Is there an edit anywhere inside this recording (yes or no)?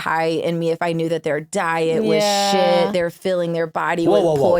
no